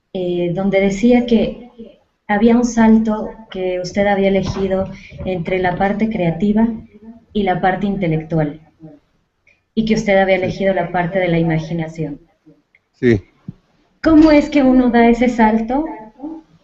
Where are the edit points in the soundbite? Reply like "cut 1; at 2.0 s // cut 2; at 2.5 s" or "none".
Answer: none